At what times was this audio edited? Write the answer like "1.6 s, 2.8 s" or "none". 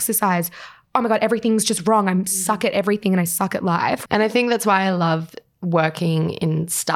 4.0 s